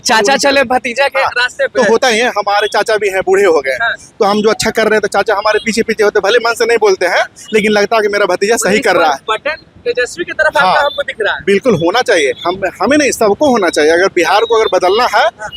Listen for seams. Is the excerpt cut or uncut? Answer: uncut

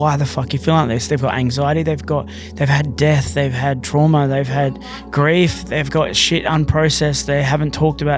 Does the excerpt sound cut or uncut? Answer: uncut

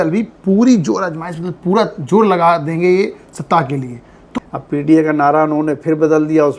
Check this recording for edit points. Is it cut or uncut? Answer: cut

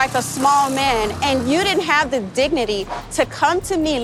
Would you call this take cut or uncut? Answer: uncut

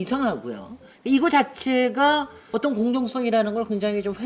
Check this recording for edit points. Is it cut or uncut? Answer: cut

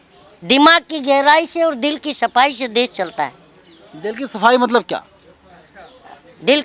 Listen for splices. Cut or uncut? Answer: uncut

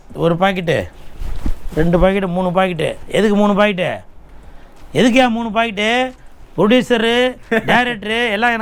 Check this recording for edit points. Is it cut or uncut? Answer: uncut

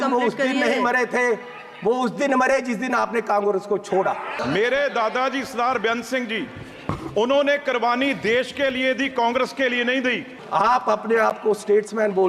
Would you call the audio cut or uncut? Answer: cut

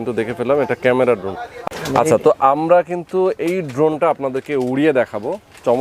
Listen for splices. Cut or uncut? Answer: cut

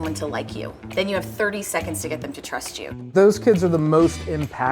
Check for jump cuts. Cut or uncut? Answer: cut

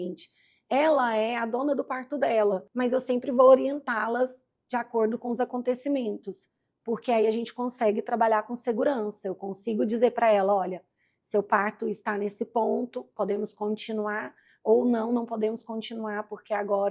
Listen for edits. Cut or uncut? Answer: cut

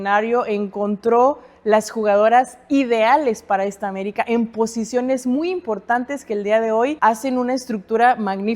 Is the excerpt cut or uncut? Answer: cut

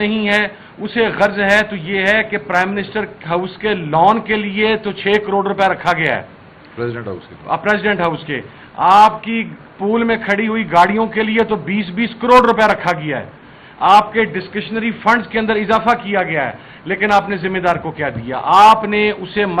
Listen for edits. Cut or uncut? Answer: uncut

